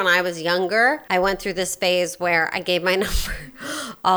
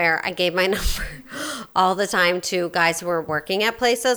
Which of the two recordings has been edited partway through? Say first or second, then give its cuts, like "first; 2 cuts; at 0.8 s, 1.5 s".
first; 1 cut; at 1.0 s